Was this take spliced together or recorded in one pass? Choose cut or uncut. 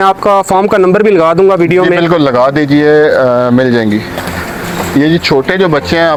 uncut